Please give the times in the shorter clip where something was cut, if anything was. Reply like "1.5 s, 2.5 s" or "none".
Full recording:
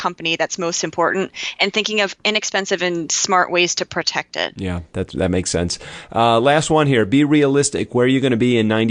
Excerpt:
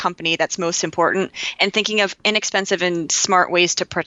none